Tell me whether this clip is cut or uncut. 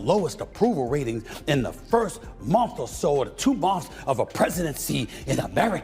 uncut